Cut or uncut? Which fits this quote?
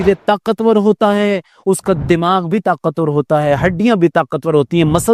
uncut